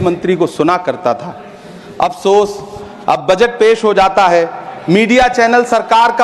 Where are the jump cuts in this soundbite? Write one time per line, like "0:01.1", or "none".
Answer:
none